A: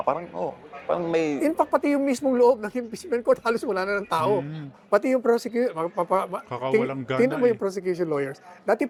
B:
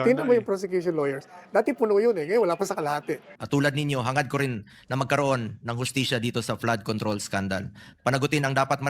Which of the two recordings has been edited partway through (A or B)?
B